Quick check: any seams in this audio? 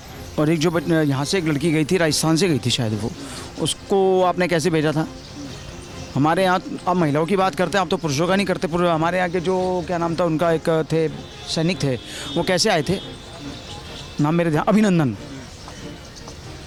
no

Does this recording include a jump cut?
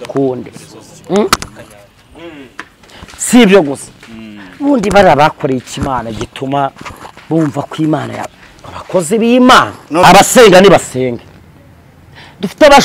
yes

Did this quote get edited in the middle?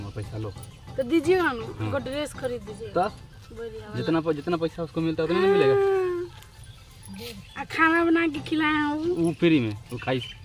no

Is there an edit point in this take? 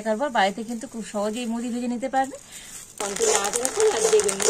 yes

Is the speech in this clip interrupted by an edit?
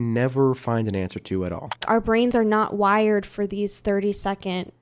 yes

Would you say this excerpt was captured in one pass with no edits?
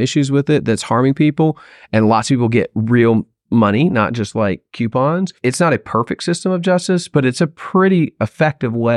no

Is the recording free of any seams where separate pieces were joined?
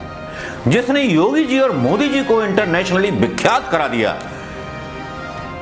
yes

